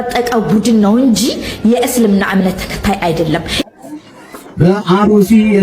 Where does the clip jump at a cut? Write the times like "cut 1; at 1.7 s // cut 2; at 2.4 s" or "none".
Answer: cut 1; at 3.6 s